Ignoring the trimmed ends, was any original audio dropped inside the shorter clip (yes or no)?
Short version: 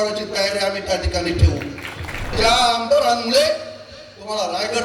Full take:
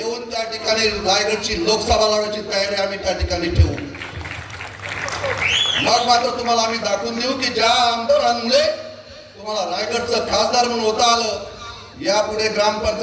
yes